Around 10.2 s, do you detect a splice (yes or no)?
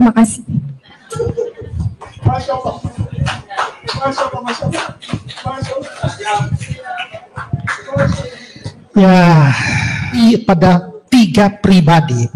yes